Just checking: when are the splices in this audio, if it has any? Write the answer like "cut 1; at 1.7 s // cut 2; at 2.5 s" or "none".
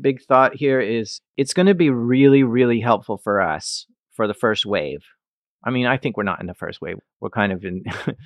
cut 1; at 1.2 s